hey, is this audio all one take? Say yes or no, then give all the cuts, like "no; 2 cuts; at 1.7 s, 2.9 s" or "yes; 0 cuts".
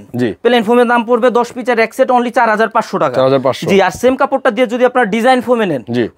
yes; 0 cuts